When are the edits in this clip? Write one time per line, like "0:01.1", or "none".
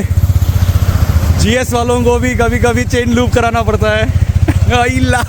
none

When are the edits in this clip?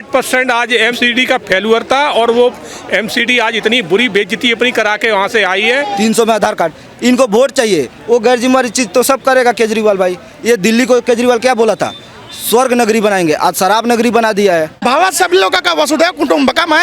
0:01.0
0:06.0
0:14.7

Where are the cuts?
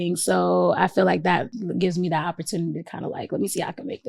0:01.6

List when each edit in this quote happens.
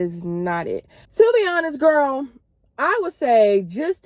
0:01.0

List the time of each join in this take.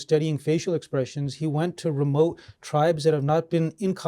none

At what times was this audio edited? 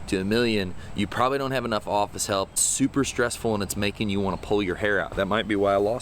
0:02.6
0:05.1

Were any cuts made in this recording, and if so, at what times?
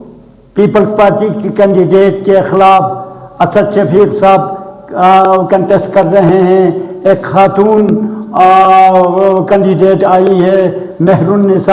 none

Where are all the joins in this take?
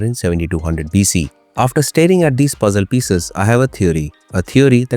0:01.4

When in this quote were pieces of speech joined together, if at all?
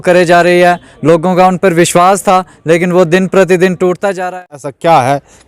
0:04.3

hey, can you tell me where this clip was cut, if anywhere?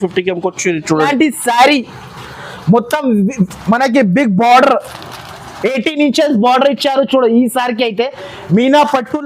0:01.1

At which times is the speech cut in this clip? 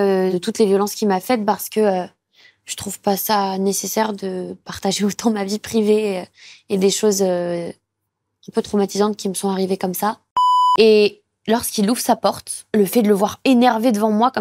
0:04.4
0:10.4

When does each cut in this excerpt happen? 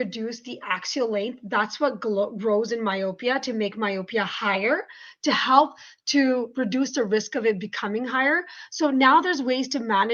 none

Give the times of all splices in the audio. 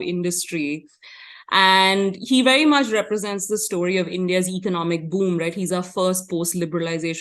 none

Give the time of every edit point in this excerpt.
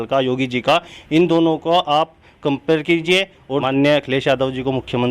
0:03.7

